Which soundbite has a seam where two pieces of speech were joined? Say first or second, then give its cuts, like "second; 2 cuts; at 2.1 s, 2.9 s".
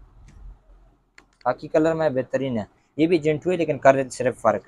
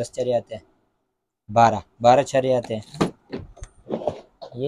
second; 1 cut; at 2.9 s